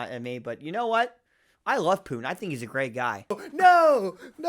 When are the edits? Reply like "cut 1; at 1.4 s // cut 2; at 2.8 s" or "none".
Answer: cut 1; at 3.4 s